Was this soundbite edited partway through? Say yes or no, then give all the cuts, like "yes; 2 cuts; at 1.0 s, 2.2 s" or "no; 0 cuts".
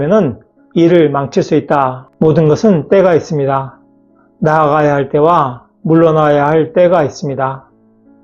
yes; 1 cut; at 2.0 s